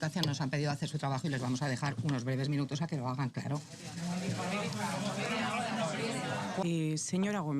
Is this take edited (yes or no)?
yes